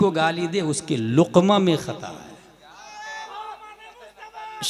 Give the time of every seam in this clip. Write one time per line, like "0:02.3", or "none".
0:03.3